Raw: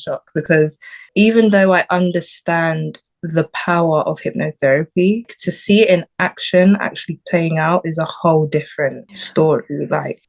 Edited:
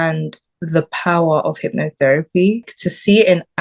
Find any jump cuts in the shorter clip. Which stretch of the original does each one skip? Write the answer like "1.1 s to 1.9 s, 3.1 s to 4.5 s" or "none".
none

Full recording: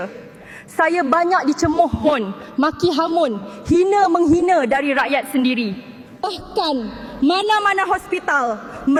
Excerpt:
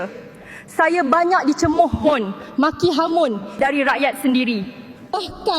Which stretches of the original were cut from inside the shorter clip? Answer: 3.6 s to 4.7 s

